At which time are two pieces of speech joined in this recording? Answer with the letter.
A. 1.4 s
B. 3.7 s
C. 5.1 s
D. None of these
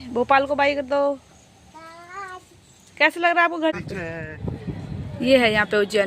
B